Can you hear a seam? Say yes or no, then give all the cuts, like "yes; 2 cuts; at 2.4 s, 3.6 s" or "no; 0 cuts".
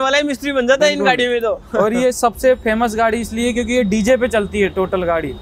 no; 0 cuts